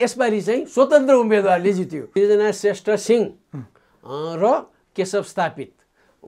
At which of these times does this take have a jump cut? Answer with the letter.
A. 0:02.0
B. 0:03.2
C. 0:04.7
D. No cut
A